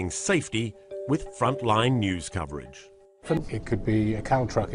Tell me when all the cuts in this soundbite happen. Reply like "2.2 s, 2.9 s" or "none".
3.4 s